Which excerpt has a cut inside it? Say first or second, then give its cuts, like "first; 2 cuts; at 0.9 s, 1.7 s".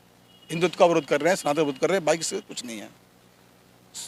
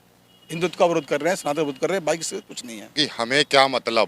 second; 1 cut; at 3.0 s